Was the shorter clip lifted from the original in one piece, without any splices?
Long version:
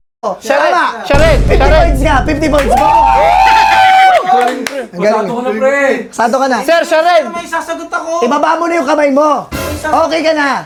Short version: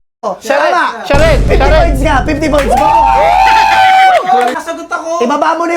no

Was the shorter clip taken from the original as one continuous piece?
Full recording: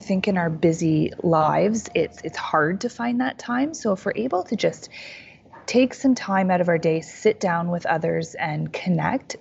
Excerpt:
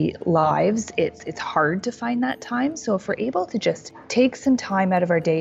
no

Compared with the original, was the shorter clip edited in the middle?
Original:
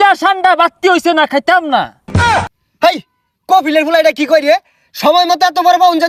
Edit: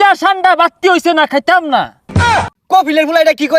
yes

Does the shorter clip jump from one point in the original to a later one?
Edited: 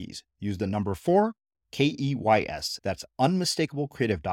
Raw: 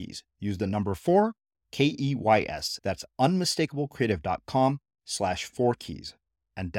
no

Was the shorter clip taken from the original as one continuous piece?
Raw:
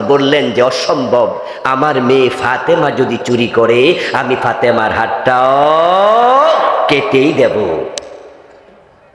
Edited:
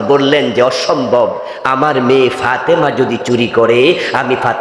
yes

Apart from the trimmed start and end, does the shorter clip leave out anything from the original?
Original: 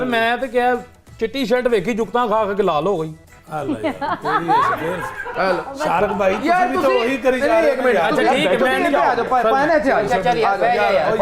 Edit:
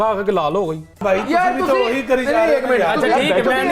yes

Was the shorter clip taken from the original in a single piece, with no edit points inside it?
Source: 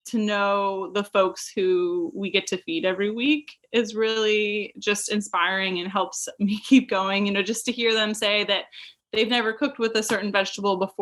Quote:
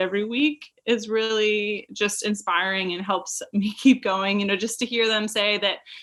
yes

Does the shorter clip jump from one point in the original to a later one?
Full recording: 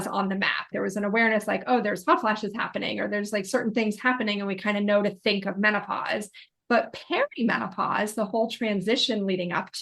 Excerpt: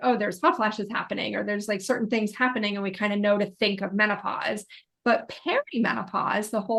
no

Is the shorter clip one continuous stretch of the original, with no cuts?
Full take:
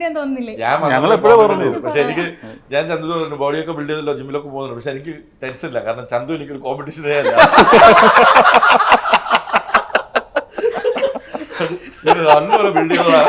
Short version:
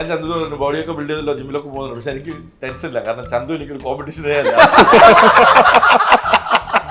yes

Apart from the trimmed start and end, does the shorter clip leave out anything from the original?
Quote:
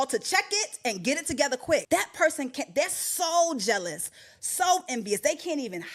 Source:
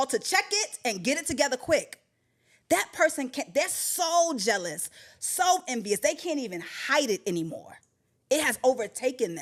yes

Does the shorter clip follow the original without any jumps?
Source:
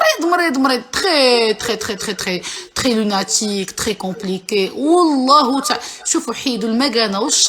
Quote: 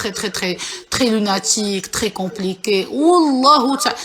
yes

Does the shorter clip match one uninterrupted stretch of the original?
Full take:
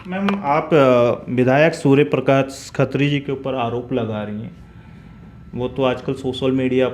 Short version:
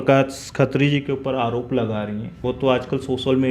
no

